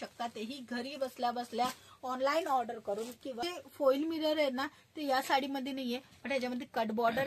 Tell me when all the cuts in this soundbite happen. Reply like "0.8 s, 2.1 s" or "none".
3.5 s